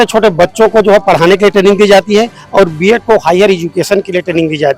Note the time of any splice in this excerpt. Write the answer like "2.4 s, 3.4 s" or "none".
none